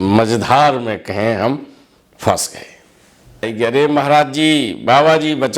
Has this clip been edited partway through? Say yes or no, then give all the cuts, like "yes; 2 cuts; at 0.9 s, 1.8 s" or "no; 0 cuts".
yes; 1 cut; at 3.5 s